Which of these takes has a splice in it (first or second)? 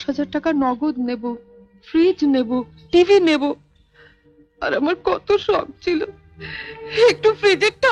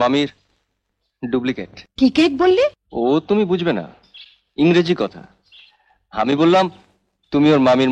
second